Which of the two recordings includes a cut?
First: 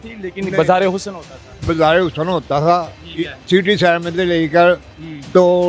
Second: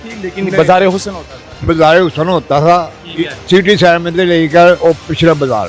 second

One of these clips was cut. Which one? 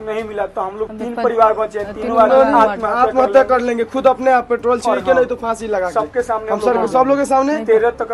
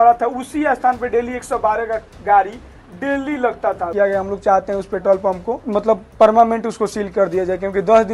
second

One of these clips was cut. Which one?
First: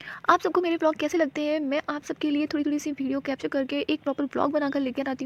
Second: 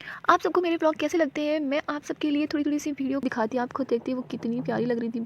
second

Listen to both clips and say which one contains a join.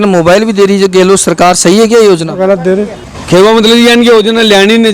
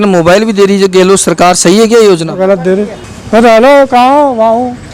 first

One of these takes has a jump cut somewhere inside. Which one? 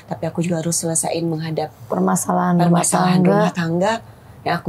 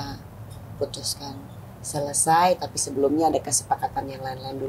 first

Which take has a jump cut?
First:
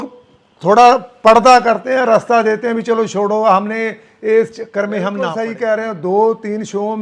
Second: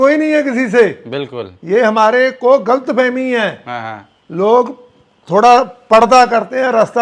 first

